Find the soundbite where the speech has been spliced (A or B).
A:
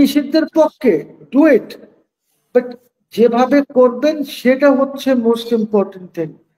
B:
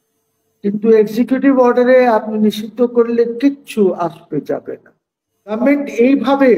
B